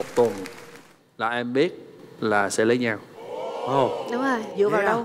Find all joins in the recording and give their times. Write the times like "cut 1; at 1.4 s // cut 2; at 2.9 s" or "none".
none